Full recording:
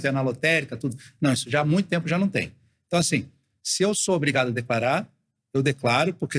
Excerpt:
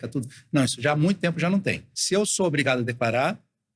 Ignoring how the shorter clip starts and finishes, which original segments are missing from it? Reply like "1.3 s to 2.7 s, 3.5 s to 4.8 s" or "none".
2.6 s to 3.6 s